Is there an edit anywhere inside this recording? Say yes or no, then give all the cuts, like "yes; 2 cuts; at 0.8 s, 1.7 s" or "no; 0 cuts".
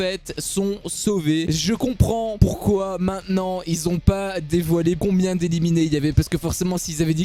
no; 0 cuts